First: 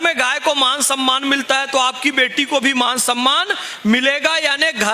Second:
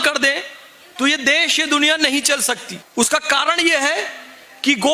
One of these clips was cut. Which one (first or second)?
second